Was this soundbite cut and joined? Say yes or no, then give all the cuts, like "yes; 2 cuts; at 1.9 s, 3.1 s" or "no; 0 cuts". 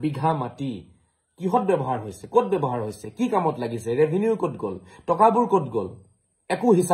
no; 0 cuts